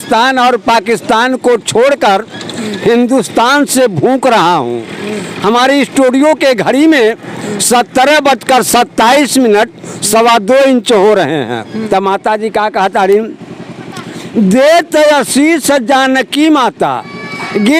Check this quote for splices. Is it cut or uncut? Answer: cut